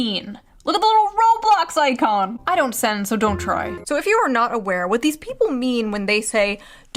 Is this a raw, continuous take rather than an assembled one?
no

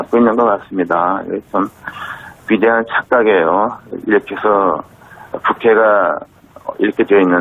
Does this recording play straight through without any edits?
no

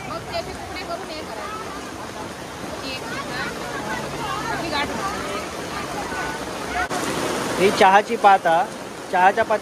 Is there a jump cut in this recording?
yes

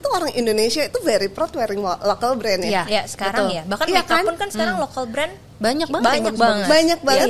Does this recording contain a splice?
no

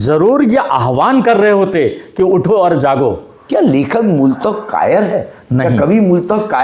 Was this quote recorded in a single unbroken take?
no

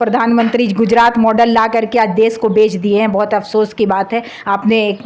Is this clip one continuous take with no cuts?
yes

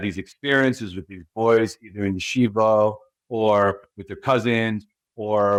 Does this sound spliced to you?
no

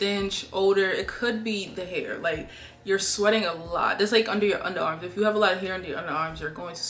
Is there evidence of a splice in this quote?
no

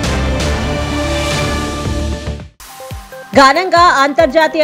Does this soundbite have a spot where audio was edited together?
yes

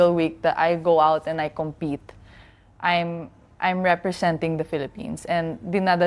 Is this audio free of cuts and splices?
yes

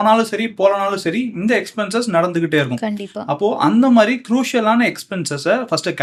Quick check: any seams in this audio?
no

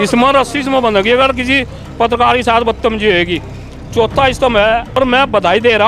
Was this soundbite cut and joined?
yes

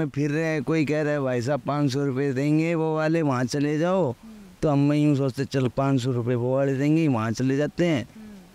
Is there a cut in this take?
no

